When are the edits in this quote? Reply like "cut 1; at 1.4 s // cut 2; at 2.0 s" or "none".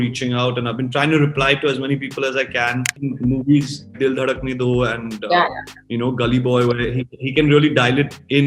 cut 1; at 3.0 s

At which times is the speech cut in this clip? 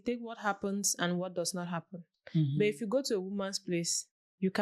none

